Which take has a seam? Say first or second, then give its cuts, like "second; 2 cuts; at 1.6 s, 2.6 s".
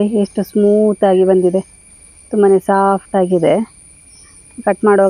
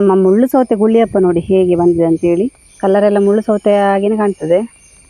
second; 1 cut; at 2.6 s